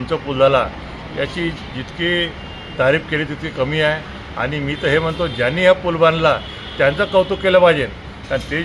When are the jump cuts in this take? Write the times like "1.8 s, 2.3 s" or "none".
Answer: none